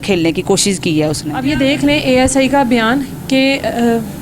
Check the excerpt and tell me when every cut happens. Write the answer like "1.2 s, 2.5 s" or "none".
1.3 s